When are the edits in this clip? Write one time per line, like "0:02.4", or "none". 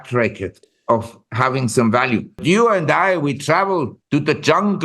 0:02.4
0:04.0